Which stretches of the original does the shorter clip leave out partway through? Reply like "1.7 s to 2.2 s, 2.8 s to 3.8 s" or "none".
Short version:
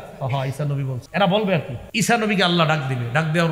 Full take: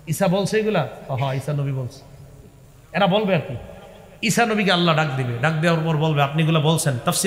1.8 s to 2.8 s, 3.6 s to 4.1 s